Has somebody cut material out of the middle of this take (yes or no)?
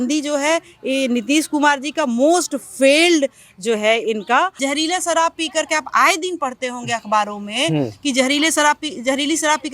yes